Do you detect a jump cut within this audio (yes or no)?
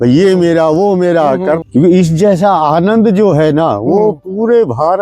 yes